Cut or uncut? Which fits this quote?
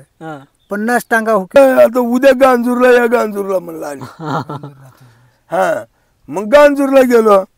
cut